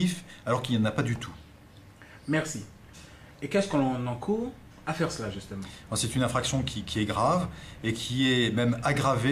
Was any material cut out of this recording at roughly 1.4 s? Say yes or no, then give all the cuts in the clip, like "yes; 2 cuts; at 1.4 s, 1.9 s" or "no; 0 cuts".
yes; 1 cut; at 1.4 s